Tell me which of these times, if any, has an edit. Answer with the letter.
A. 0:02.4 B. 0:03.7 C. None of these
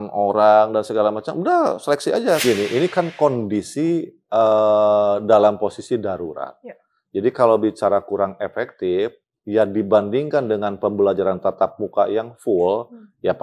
A